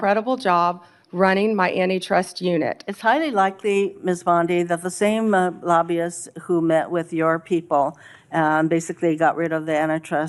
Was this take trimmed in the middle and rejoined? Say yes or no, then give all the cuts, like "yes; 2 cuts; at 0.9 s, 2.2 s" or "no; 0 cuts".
no; 0 cuts